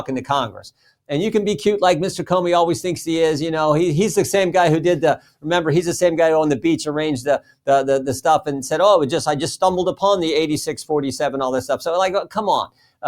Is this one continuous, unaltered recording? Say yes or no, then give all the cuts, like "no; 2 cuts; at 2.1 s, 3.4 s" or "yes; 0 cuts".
yes; 0 cuts